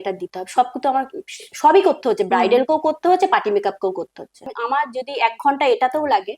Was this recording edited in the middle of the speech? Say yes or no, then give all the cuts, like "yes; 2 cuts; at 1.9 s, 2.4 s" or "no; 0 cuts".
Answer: yes; 1 cut; at 4.5 s